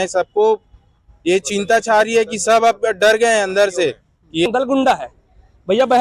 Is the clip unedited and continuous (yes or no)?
no